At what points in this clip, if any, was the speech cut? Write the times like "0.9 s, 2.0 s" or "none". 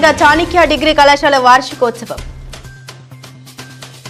none